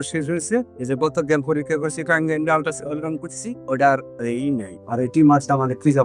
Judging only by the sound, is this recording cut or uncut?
uncut